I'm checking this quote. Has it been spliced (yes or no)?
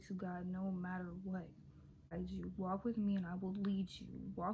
yes